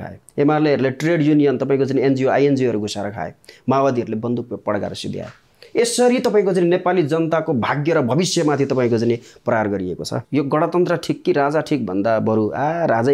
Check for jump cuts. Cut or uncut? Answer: cut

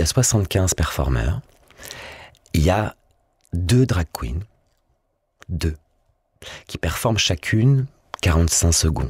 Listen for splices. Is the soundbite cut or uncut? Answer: uncut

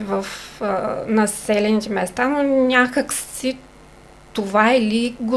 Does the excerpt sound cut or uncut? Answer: uncut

